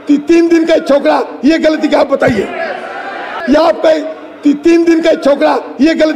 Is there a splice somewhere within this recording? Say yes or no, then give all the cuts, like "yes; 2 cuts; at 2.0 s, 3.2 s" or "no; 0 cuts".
yes; 1 cut; at 3.3 s